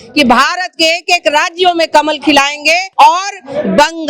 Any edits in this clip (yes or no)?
yes